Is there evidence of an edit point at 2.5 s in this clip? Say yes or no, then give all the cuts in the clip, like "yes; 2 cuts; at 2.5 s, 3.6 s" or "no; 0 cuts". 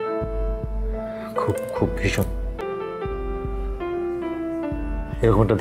yes; 1 cut; at 2.5 s